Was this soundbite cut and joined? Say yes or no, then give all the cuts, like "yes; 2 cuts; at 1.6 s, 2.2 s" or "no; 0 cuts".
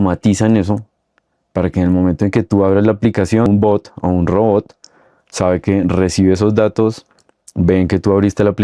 yes; 1 cut; at 3.5 s